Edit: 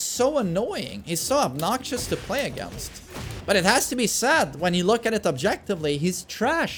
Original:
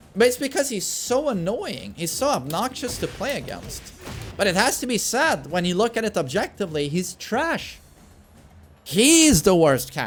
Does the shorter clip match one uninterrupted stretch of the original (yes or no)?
yes